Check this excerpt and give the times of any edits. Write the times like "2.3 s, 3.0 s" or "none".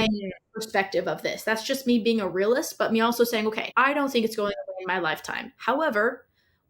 3.6 s